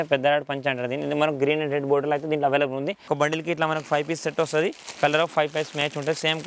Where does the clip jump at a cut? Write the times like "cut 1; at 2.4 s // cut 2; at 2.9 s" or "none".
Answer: cut 1; at 3.0 s